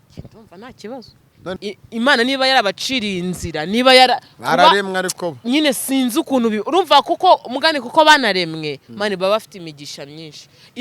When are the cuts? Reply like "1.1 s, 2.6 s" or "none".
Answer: 1.6 s